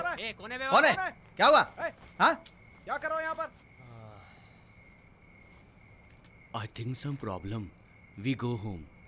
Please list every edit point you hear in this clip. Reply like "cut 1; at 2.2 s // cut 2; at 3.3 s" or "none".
none